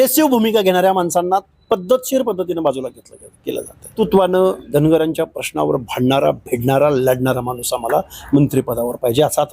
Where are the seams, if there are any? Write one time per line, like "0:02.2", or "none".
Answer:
0:03.9